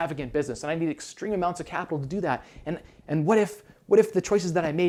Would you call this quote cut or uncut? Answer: uncut